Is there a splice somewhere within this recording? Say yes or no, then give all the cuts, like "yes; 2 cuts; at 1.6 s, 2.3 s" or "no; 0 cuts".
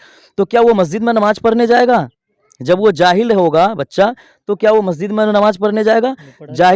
no; 0 cuts